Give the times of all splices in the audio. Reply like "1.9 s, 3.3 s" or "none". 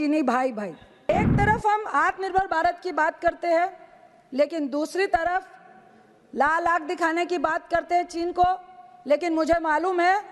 1.1 s